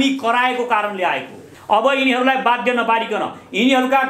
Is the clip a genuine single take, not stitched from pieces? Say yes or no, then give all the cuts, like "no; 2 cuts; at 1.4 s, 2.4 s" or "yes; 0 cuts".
no; 1 cut; at 1.5 s